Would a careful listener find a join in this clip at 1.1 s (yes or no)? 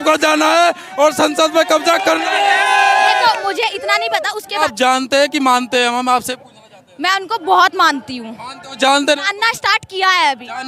no